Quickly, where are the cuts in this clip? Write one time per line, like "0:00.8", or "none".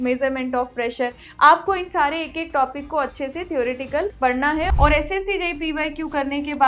0:04.7